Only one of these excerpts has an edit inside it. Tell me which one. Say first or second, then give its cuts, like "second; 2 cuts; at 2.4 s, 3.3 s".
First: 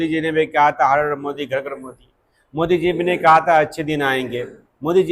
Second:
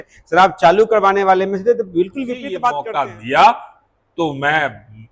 second; 1 cut; at 2.8 s